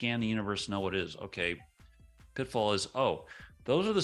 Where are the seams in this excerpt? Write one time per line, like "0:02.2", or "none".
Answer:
none